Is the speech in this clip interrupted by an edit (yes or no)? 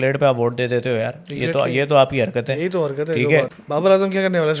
yes